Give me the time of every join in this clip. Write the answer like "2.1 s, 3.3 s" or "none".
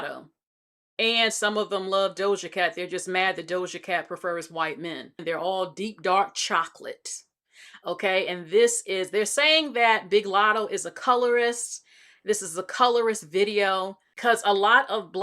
5.1 s, 14.0 s